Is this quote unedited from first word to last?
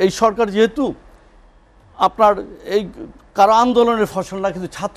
yes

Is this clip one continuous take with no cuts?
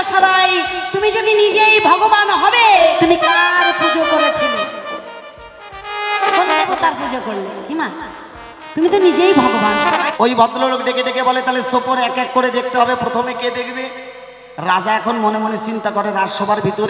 no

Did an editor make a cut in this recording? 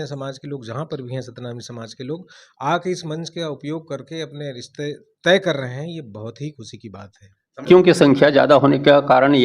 yes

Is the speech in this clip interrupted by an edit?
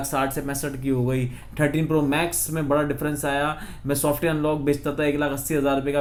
no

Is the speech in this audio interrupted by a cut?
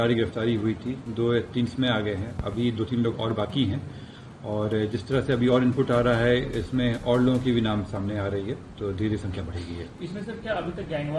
no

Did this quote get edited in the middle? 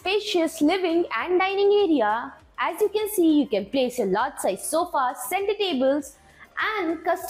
no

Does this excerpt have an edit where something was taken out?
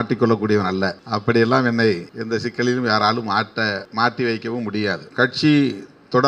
yes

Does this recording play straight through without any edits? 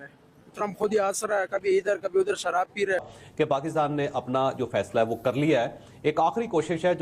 no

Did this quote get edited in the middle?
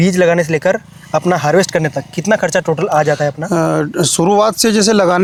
no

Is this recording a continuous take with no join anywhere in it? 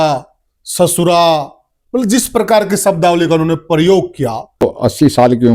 no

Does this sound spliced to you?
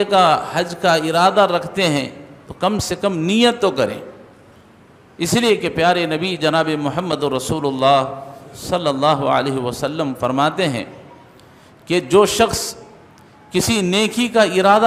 no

